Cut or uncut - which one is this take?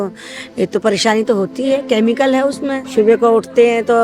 cut